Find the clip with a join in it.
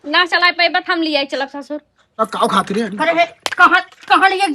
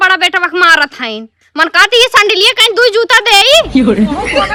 first; 1 cut; at 2.2 s

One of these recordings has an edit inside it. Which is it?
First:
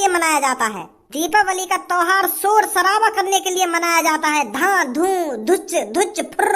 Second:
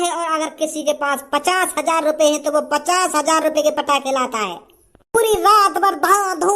first; 1 cut; at 1.2 s

